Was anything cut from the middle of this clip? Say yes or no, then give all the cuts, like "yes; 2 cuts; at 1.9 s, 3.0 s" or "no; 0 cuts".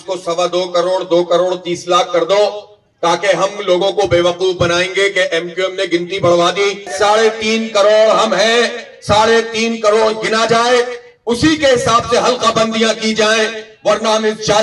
yes; 1 cut; at 6.9 s